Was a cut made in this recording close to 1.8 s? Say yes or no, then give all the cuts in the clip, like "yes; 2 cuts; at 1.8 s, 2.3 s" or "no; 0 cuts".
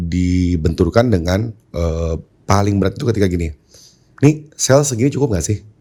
no; 0 cuts